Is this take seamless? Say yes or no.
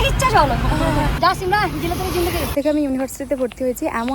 no